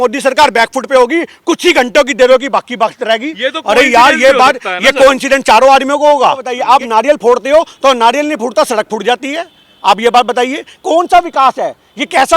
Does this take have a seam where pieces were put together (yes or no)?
yes